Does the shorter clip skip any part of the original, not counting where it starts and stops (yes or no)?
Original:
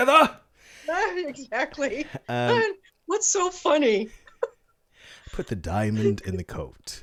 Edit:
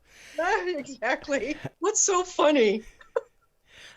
yes